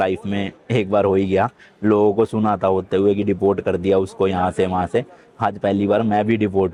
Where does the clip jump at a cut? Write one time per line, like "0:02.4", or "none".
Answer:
none